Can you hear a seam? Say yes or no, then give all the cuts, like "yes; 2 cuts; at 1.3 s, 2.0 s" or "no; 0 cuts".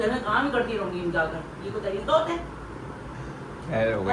no; 0 cuts